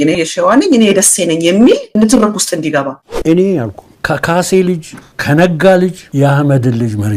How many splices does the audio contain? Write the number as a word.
two